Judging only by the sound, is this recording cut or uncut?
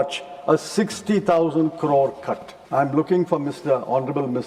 cut